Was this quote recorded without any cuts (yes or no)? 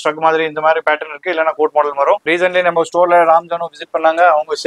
no